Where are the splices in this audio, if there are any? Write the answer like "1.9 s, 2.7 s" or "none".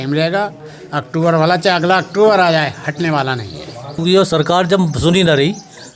4.0 s